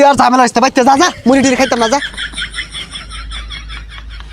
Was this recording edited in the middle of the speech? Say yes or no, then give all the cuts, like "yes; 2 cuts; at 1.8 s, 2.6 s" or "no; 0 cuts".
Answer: yes; 1 cut; at 2.1 s